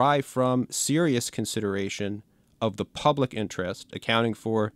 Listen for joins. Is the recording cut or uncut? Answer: uncut